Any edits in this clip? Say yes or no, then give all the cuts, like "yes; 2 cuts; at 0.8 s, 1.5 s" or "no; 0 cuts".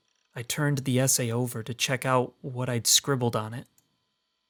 no; 0 cuts